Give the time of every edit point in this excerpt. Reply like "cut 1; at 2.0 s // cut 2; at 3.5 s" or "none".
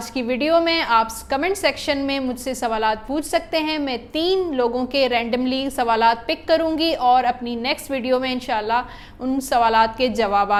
none